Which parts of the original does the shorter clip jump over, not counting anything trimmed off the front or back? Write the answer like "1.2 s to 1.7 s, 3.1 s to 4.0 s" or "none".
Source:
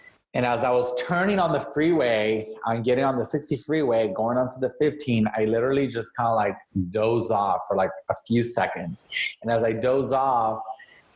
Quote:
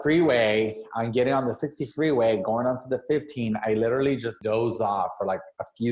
6.1 s to 6.9 s